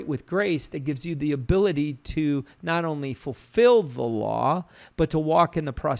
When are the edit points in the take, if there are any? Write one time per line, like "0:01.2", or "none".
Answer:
none